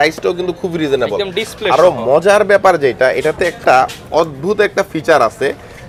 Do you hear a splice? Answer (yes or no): no